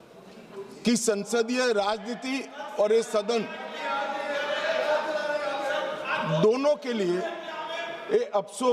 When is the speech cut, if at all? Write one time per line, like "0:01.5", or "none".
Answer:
none